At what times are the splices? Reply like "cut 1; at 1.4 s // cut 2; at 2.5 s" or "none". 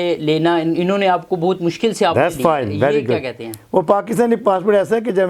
none